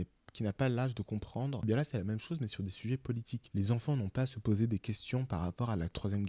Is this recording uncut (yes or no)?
no